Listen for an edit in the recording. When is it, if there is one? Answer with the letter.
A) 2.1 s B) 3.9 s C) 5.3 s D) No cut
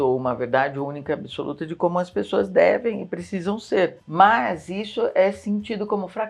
D